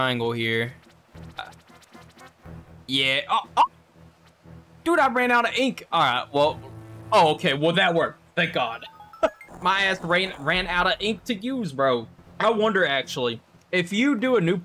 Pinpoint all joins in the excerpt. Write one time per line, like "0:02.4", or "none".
0:01.4
0:09.5
0:12.2
0:13.5